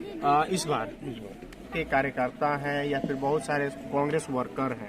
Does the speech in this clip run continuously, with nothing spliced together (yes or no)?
no